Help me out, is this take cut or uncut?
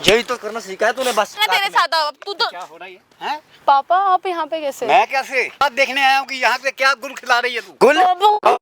cut